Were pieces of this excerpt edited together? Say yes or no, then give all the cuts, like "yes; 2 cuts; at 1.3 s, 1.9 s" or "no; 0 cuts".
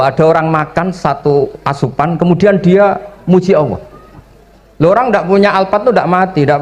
no; 0 cuts